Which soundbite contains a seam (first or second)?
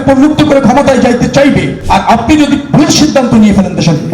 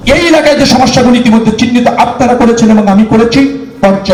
first